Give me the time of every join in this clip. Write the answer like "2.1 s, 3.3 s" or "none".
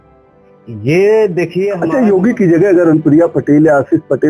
1.8 s

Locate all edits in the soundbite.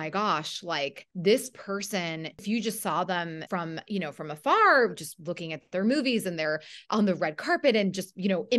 1.0 s, 2.4 s, 3.4 s

